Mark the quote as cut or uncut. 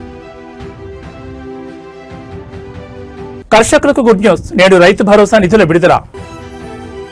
uncut